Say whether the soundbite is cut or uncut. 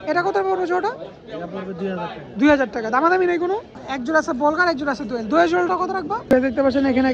cut